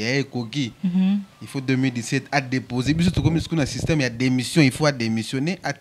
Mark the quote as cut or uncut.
uncut